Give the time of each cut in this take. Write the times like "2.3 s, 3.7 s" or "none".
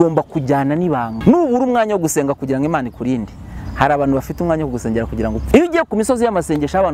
1.1 s, 5.4 s